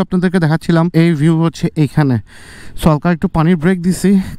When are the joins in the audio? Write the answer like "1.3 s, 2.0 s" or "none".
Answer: 0.9 s